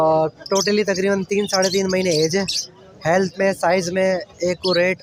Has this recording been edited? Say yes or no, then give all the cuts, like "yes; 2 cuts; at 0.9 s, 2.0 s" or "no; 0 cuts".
no; 0 cuts